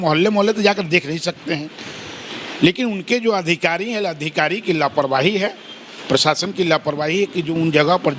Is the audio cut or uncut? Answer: uncut